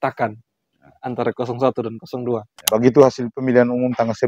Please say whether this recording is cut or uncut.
cut